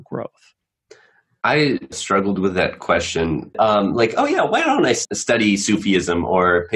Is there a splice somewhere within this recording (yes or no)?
yes